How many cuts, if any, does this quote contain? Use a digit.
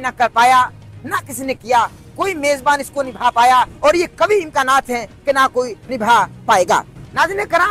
0